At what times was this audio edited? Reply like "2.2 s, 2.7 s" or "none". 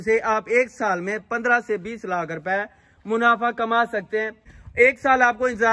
4.5 s